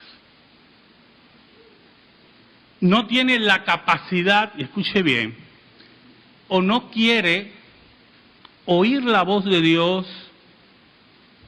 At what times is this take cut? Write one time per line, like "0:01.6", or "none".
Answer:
0:04.1

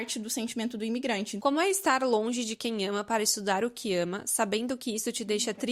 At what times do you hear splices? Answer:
0:01.3

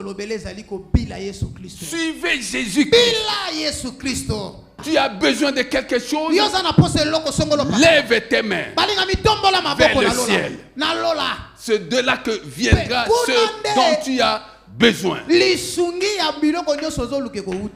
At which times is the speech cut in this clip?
0:04.8

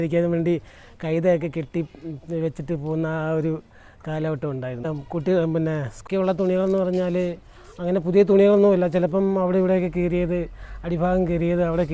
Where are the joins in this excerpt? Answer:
0:04.9
0:06.0

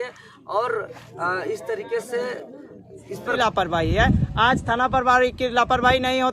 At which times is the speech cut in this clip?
0:03.4

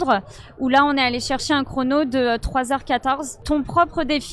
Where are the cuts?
0:03.4

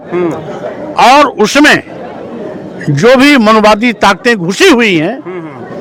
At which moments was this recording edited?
none

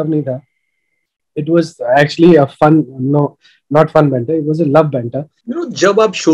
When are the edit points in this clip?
0:05.4

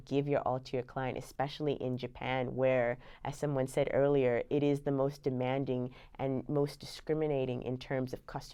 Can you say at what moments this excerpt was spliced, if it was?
none

